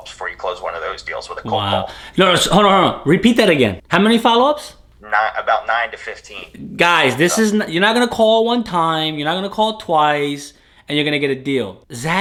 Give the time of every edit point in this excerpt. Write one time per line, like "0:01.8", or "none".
none

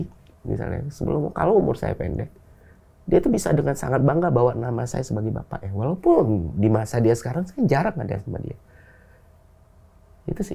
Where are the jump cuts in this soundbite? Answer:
none

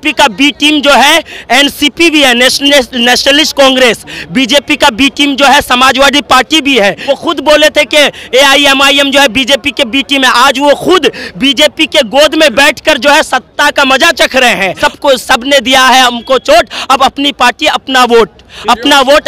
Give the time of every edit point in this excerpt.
0:07.0
0:14.7

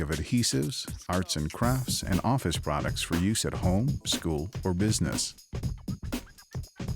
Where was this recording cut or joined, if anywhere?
0:05.1

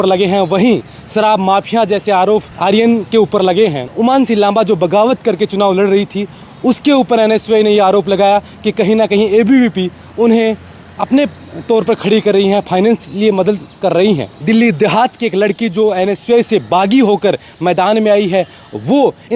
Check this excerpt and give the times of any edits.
0:02.5
0:03.9
0:14.3

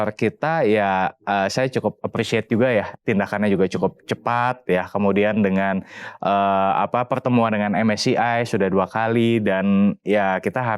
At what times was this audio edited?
0:02.9

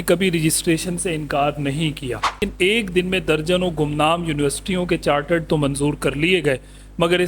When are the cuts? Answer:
0:02.4

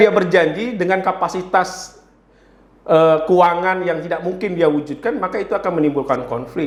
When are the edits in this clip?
none

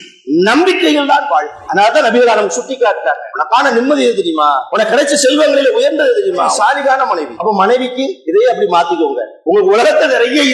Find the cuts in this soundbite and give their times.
0:01.6
0:03.3
0:04.6
0:06.5
0:07.3
0:08.2
0:09.3

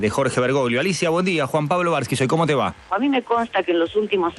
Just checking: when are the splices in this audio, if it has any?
0:02.8

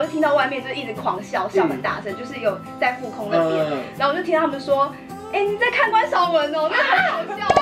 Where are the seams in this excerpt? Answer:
none

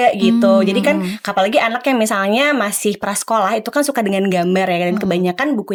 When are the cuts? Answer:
none

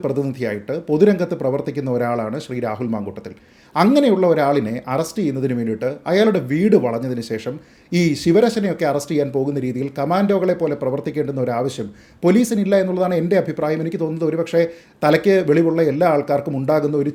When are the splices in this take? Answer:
none

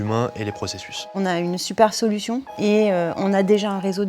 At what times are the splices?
0:01.1
0:02.5

